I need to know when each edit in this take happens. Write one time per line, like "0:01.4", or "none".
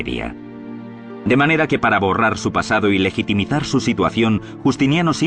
0:03.6